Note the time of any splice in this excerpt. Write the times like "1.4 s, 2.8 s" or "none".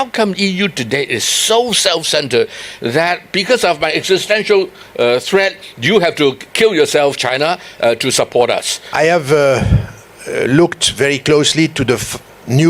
8.8 s